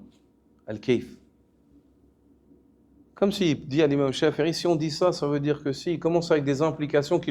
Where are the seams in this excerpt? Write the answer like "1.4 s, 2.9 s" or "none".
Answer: 2.5 s

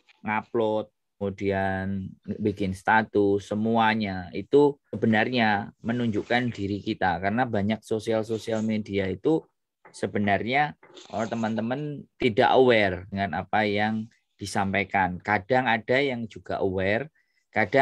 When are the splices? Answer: 1.2 s, 5.0 s, 12.0 s, 13.1 s

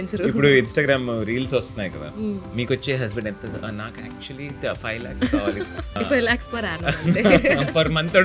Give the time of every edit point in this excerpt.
6.0 s

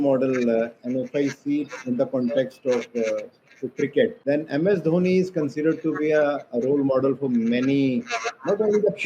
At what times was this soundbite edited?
4.2 s

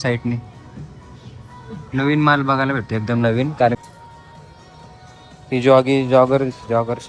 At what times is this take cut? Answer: 3.8 s

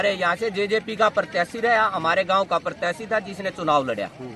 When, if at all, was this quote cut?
none

